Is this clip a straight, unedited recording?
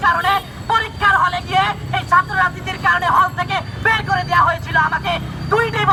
yes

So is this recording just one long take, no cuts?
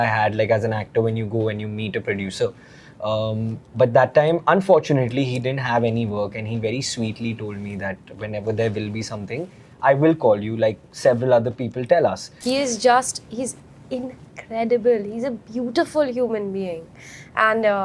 no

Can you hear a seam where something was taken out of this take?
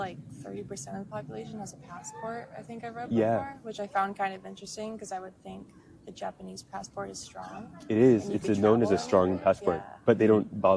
no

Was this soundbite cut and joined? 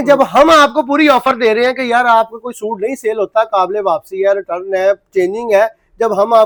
no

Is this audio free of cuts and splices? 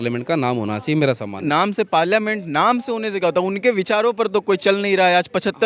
no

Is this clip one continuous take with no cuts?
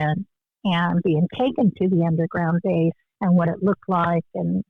no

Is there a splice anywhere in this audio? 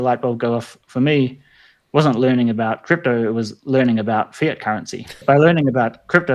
yes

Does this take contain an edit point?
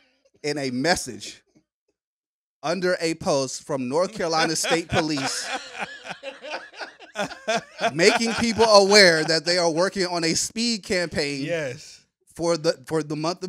no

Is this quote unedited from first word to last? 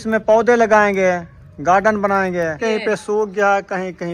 no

